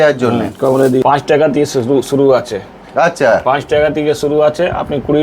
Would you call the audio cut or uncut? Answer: cut